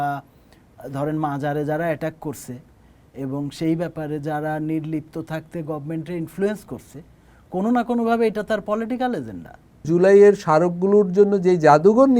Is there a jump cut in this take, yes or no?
yes